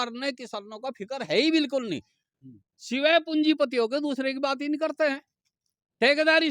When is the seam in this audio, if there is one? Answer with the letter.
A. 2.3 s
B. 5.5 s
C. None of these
C